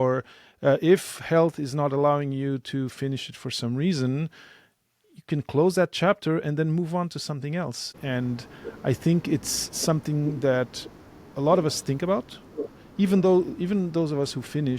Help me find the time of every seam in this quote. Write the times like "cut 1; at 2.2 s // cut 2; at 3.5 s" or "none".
none